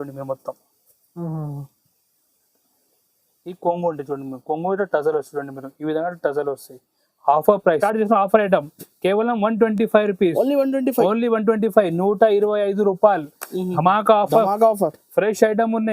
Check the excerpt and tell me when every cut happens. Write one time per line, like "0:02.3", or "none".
0:07.8

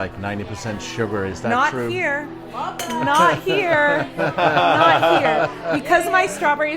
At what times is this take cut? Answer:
none

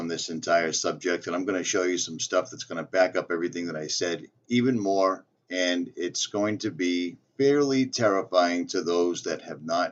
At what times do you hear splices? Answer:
0:08.4

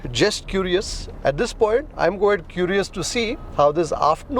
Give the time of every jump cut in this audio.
0:01.1
0:01.9

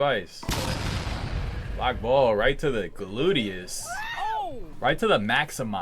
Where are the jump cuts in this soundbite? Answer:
0:04.7

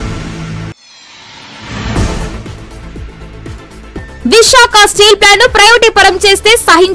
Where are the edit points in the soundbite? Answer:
0:03.4

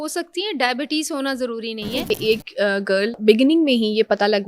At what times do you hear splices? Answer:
0:02.1
0:03.2

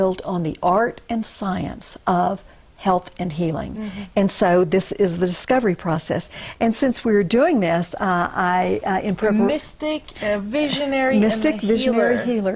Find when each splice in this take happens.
0:07.8

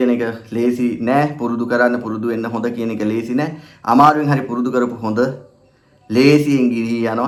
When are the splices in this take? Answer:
none

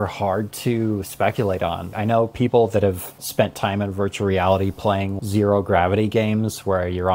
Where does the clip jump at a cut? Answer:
0:01.9
0:03.2
0:05.1

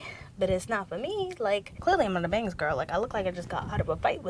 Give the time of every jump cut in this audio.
0:01.8

